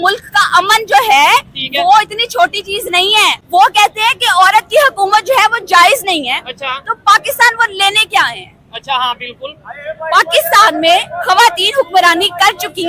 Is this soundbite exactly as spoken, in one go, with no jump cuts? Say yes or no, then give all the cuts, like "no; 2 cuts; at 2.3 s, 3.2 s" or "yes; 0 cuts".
no; 1 cut; at 3.4 s